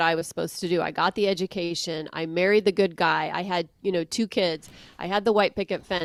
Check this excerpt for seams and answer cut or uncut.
uncut